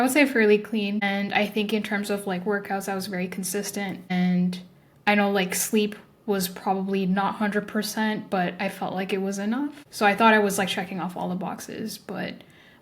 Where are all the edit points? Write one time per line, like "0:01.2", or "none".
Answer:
0:01.0
0:04.1
0:09.8

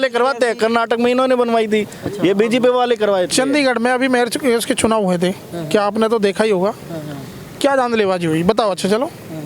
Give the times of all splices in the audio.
none

